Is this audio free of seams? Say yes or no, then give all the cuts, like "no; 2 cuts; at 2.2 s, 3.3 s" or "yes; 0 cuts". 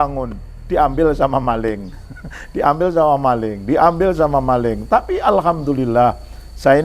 yes; 0 cuts